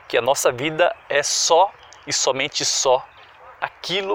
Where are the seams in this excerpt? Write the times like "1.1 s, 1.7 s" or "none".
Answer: none

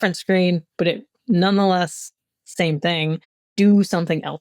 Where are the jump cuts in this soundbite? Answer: 3.4 s

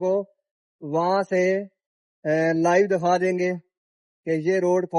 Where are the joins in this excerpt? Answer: none

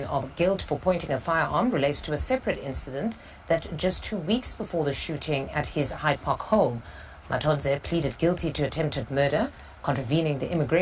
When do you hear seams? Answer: none

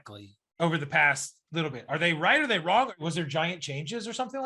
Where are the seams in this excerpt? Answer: 3.0 s

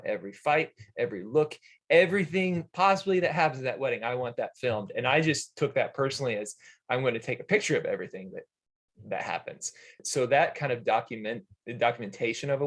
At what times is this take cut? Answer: 10.0 s

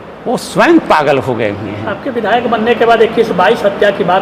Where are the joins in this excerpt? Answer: none

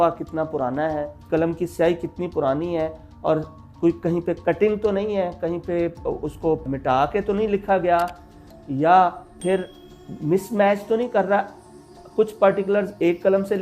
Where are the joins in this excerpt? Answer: 1.3 s

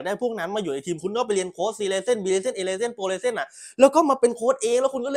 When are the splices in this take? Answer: none

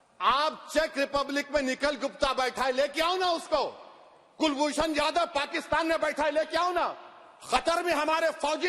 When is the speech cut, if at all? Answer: none

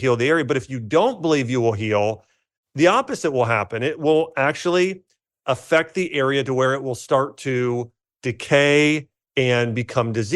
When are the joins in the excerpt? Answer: 8.1 s

